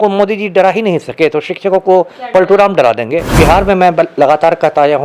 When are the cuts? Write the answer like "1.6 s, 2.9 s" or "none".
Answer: 3.4 s